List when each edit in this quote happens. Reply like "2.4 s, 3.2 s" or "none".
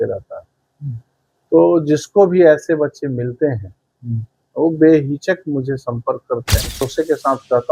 6.8 s